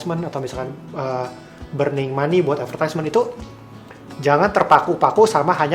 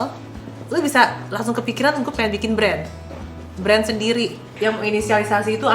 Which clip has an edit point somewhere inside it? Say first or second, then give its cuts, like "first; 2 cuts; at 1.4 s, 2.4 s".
second; 1 cut; at 4.5 s